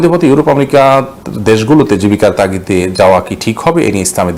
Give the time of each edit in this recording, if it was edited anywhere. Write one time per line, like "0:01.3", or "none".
none